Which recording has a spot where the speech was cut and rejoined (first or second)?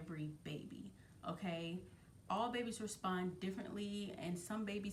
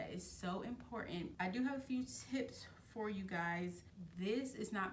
second